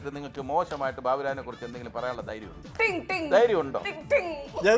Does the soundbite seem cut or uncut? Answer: uncut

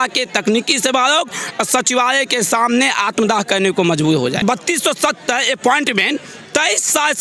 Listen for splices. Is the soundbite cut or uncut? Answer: cut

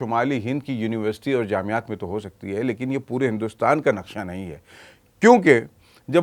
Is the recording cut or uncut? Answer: uncut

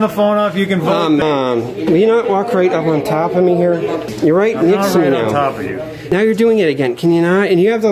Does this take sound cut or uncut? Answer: cut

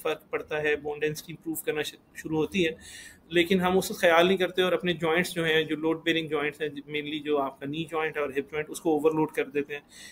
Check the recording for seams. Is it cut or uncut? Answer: uncut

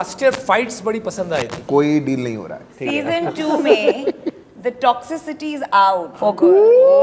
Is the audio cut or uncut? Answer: cut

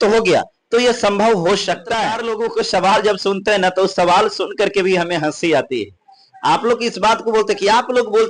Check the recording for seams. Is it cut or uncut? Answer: cut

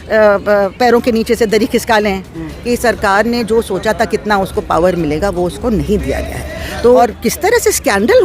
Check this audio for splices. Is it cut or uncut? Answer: cut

